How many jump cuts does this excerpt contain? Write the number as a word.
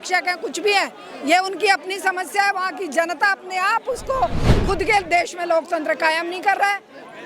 one